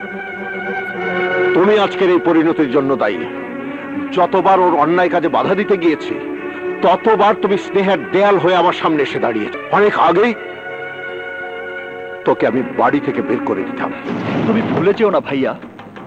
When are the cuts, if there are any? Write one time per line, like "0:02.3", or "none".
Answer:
0:09.6